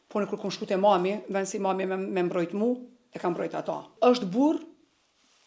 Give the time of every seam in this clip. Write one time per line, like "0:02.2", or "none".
0:03.9